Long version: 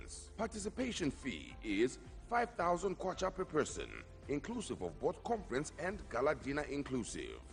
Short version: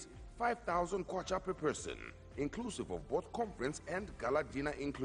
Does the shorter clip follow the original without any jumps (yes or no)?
yes